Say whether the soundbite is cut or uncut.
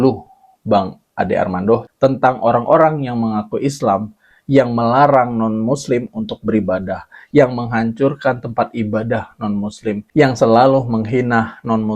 uncut